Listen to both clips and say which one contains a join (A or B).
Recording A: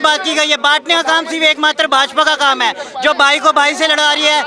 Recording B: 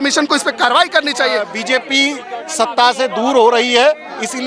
B